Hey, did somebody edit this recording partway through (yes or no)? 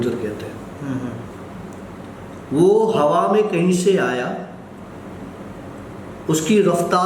no